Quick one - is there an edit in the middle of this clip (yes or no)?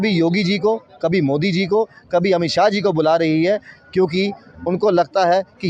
no